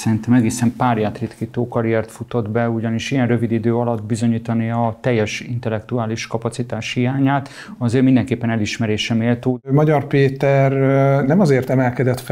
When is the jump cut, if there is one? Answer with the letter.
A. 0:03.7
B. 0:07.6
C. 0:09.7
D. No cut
C